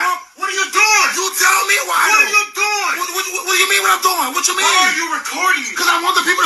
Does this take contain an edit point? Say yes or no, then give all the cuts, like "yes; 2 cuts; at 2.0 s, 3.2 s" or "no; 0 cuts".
yes; 1 cut; at 2.8 s